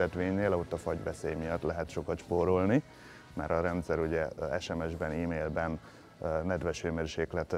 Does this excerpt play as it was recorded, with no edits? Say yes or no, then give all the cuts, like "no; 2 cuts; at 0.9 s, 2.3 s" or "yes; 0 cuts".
yes; 0 cuts